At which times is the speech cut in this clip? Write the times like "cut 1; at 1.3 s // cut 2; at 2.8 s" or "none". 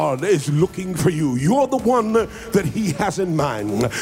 cut 1; at 1.0 s